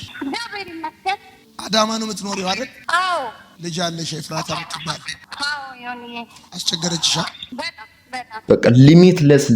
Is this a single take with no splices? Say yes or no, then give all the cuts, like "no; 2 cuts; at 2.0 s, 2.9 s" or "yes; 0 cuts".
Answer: no; 1 cut; at 8.3 s